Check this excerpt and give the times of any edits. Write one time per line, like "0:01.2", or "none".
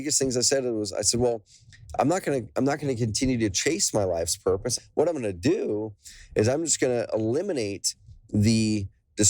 0:04.7